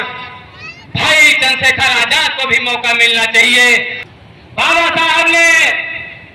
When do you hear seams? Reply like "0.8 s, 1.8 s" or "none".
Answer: 4.0 s